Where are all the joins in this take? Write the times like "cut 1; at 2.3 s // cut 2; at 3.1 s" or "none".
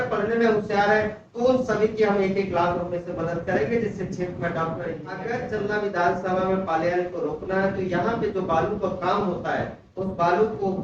cut 1; at 5.1 s